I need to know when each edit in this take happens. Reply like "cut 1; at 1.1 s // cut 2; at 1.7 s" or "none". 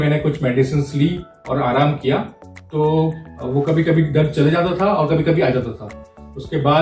none